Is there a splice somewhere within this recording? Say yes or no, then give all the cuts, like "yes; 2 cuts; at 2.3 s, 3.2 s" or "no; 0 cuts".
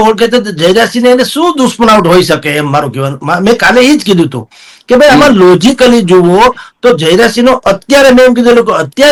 no; 0 cuts